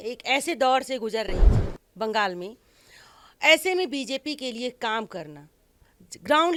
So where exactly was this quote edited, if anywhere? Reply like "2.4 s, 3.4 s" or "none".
none